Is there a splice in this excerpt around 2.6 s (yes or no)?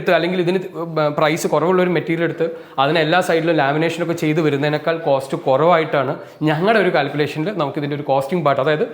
no